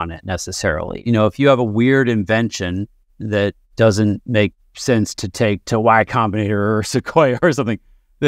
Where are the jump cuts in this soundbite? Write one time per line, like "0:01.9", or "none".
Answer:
0:01.0